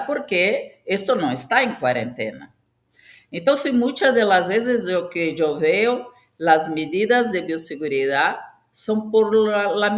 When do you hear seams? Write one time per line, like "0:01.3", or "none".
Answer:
none